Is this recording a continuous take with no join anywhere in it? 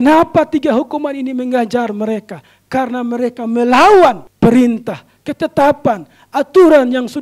no; 1 cut; at 4.3 s

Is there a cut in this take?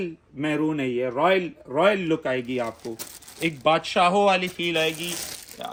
no; 0 cuts

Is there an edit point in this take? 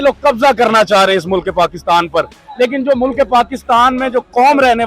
no; 0 cuts

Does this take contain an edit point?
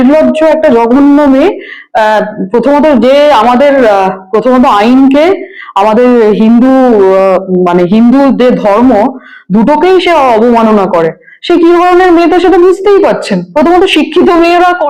no; 0 cuts

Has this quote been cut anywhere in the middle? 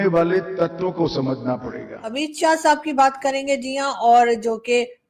yes; 1 cut; at 2.1 s

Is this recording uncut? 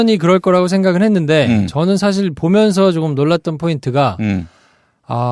yes; 0 cuts

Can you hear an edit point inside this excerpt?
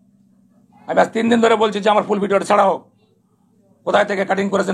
no; 0 cuts

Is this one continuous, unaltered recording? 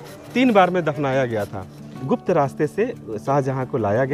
no; 1 cut; at 2.0 s

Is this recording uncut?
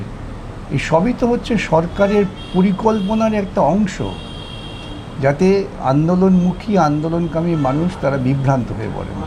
yes; 0 cuts

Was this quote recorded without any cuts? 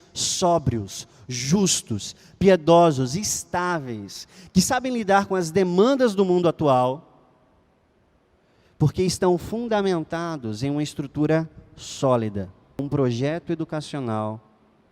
no; 1 cut; at 12.8 s

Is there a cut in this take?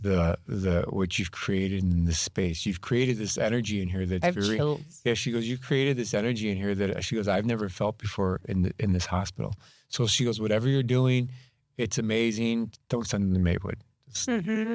yes; 1 cut; at 12.8 s

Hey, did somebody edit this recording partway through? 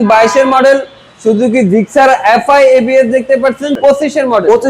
yes; 1 cut; at 3.8 s

